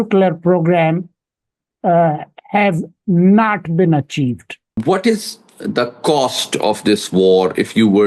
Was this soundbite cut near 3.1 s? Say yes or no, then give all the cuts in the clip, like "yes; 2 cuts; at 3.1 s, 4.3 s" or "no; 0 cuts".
no; 1 cut; at 4.8 s